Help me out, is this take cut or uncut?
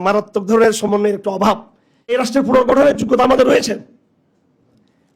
cut